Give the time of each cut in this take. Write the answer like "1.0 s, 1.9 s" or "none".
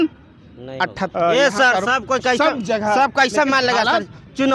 1.0 s